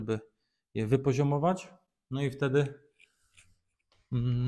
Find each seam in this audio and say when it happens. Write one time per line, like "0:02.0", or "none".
none